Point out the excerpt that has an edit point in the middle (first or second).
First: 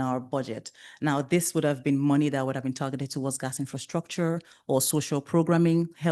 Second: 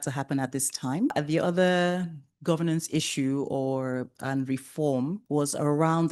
second